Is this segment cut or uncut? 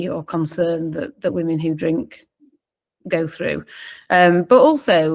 uncut